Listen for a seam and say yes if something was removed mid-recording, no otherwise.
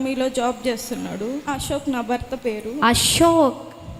yes